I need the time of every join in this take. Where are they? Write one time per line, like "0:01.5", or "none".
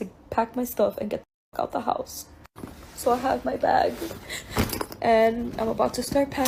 0:02.5